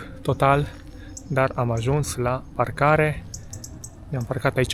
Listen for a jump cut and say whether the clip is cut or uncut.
uncut